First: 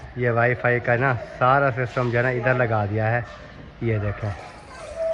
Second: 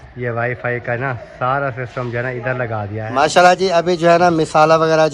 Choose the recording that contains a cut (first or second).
second